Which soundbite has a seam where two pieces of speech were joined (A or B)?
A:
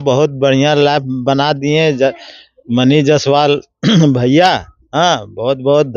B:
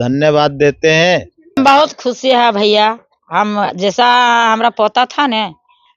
B